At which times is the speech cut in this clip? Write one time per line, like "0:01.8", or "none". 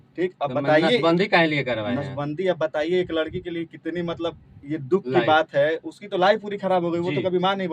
none